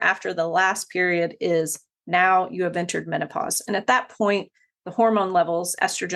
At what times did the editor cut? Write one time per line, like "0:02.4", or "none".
none